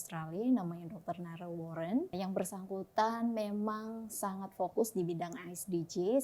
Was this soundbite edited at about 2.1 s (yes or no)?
yes